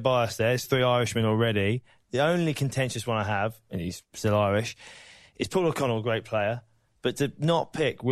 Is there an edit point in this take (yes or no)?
no